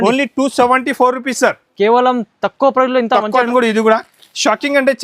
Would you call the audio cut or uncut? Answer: cut